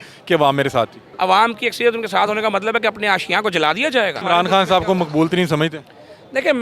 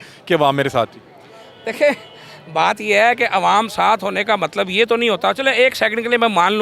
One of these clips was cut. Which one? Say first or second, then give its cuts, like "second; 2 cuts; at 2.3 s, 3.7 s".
first; 2 cuts; at 1.0 s, 4.2 s